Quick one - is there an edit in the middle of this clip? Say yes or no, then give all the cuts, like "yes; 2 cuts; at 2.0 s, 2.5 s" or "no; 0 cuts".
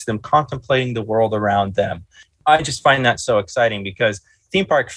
no; 0 cuts